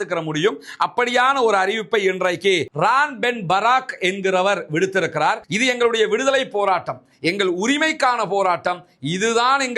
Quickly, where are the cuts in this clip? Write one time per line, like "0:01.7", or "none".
0:05.5

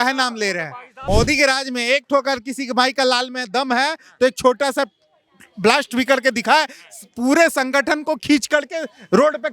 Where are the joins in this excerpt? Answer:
0:01.0

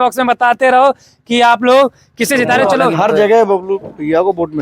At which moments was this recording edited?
0:02.8

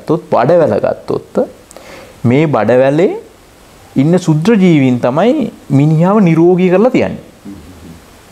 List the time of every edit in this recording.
none

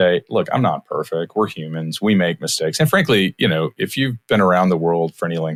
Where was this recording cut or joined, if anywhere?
none

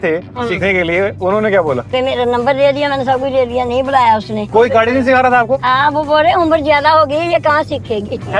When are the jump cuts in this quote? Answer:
0:01.9
0:04.4

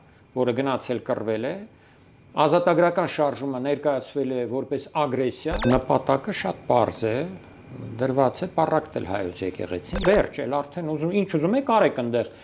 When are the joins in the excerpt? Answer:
0:05.6
0:10.0

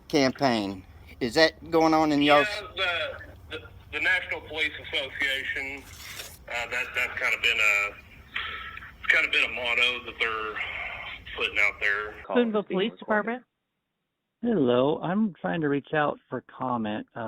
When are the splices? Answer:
0:12.2

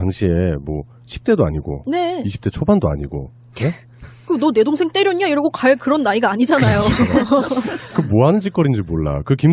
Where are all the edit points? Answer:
0:05.0

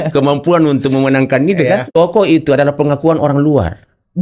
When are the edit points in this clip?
0:01.9

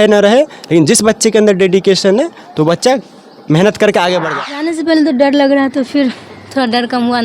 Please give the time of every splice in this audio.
0:04.2

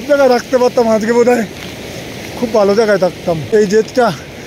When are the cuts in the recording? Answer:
0:03.4

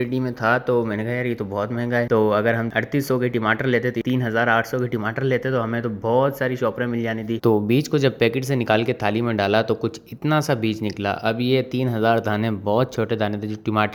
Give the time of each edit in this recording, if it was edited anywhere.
none

